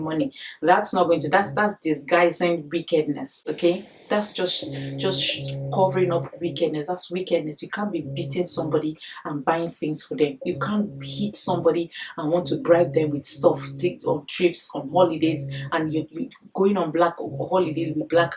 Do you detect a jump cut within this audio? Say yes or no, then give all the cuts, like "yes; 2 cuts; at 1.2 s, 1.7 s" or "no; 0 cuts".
no; 0 cuts